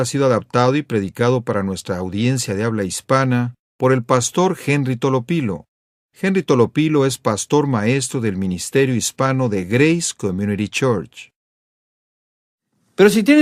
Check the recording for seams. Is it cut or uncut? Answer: uncut